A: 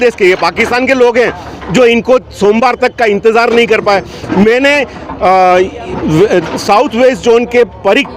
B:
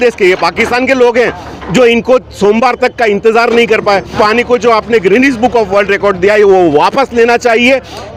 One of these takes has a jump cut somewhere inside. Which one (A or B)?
B